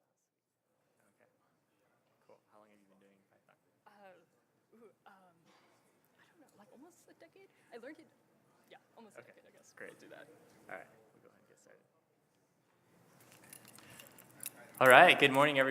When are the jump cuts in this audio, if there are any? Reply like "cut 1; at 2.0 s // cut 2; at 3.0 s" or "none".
none